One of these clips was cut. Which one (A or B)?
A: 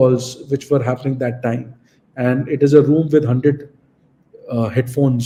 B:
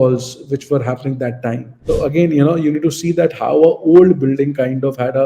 B